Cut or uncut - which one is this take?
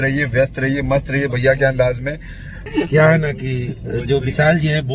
cut